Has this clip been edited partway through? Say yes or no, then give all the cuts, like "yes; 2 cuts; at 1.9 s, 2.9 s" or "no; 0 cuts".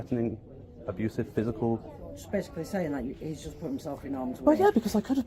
no; 0 cuts